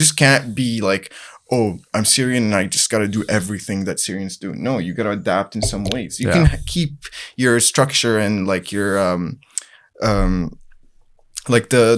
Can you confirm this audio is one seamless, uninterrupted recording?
yes; 0 cuts

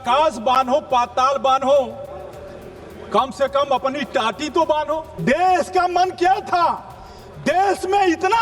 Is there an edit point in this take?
yes; 1 cut; at 5.1 s

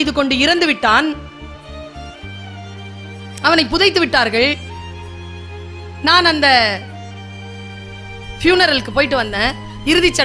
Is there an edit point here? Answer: no; 0 cuts

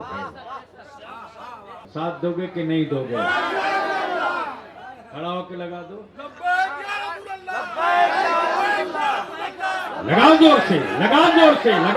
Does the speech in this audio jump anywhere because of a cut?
yes; 1 cut; at 1.8 s

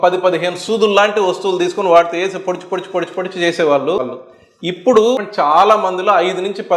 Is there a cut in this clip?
yes; 2 cuts; at 4.2 s, 5.2 s

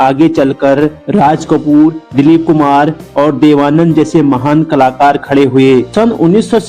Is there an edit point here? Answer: no; 0 cuts

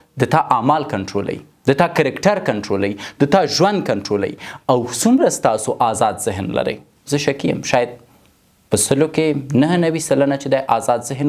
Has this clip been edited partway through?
no; 0 cuts

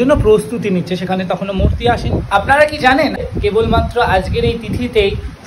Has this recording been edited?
yes; 2 cuts; at 2.1 s, 3.2 s

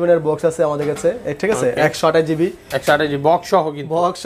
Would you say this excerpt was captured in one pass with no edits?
yes; 0 cuts

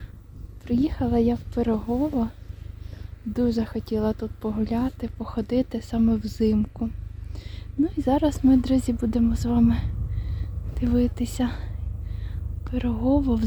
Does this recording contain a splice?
no; 0 cuts

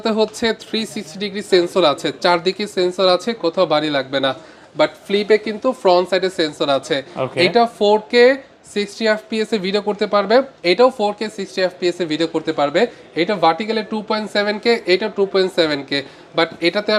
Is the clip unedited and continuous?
yes; 0 cuts

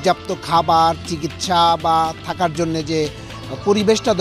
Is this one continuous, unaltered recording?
yes; 0 cuts

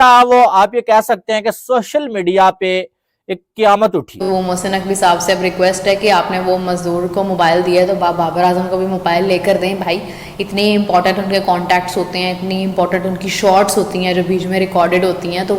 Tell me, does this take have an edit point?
yes; 1 cut; at 4.1 s

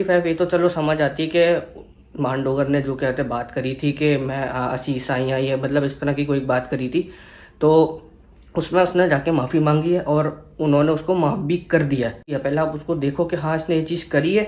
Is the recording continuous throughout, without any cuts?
no; 1 cut; at 12.3 s

